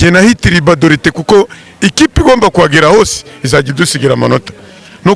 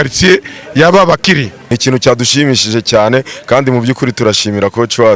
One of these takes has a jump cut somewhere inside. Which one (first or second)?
second